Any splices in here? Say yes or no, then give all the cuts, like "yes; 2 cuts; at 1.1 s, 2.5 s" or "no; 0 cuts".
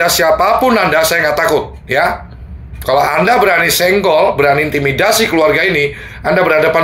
no; 0 cuts